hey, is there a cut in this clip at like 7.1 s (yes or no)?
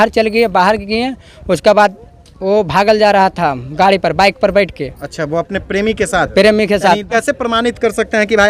yes